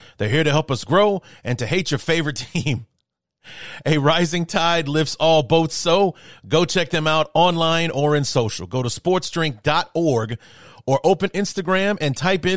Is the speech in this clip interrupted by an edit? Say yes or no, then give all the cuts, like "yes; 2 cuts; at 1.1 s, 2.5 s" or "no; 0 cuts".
no; 0 cuts